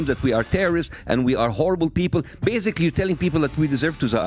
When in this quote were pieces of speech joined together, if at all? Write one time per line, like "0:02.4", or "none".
none